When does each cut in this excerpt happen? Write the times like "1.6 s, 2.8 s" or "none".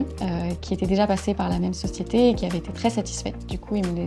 none